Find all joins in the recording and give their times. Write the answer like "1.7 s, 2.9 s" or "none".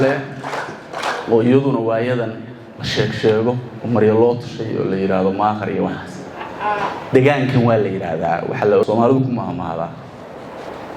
8.8 s